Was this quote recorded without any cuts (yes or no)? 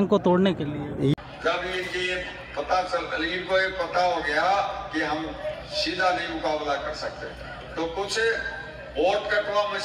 yes